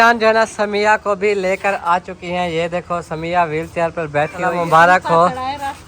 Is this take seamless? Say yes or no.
no